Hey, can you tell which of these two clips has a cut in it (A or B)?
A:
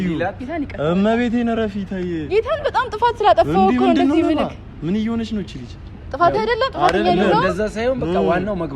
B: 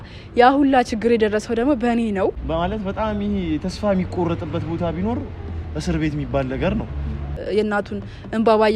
B